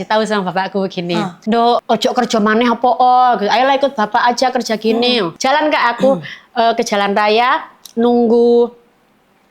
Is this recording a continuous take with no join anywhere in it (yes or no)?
no